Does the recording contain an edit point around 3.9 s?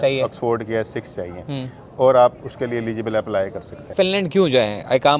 yes; 1 cut; at 3.9 s

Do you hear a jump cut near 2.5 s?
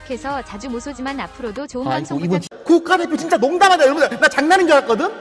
yes; 1 cut; at 2.5 s

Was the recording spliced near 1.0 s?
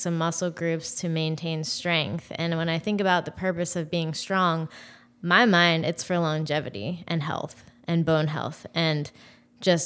no; 0 cuts

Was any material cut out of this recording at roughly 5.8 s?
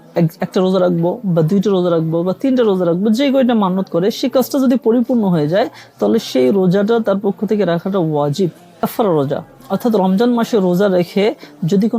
no; 1 cut; at 8.8 s

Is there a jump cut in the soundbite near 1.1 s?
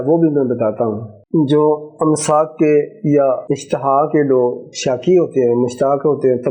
yes; 2 cuts; at 1.1 s, 3.5 s

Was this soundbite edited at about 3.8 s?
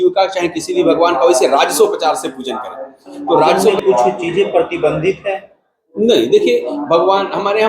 yes; 1 cut; at 3.8 s

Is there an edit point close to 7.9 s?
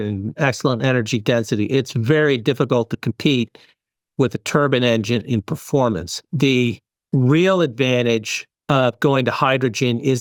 no; 0 cuts

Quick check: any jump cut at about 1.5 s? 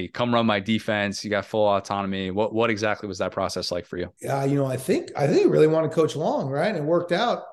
no; 1 cut; at 4.1 s

